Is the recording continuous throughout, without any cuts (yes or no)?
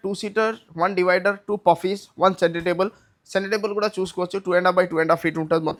yes